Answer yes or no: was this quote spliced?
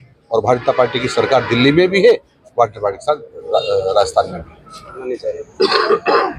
yes